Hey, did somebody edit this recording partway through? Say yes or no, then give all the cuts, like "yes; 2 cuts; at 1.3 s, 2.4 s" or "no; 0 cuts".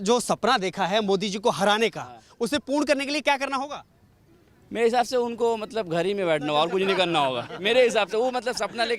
no; 0 cuts